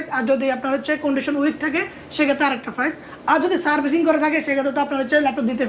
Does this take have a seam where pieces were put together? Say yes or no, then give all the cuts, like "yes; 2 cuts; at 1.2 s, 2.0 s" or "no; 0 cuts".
no; 0 cuts